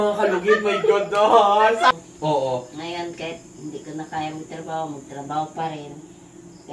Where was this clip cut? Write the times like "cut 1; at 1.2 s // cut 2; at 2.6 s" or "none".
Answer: cut 1; at 1.9 s

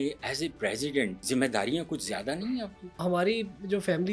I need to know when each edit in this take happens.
cut 1; at 1.2 s // cut 2; at 2.9 s

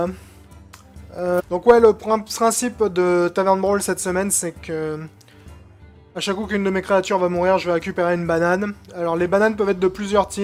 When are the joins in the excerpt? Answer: none

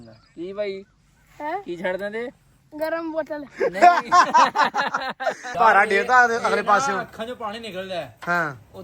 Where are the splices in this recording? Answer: cut 1; at 5.4 s

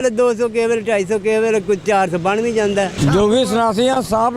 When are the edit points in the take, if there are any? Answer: cut 1; at 2.9 s

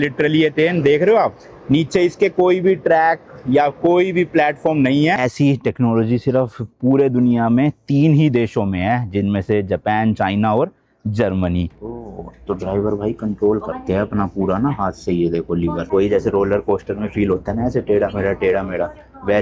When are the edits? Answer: cut 1; at 5.3 s // cut 2; at 12.0 s // cut 3; at 15.8 s

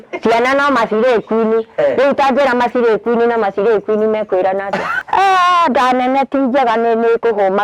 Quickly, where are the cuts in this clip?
cut 1; at 5.0 s

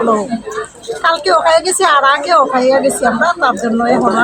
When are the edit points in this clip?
none

